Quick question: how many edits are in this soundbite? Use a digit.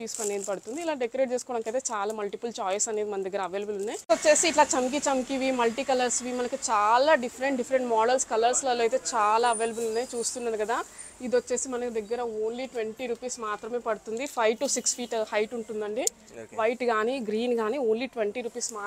1